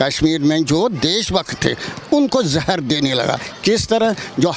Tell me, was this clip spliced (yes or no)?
no